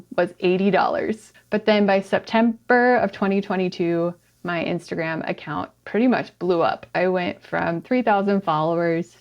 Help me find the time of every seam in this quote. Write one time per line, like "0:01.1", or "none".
0:01.3